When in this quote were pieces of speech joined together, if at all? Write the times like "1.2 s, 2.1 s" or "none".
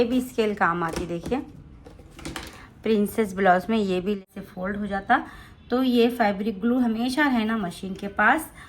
4.2 s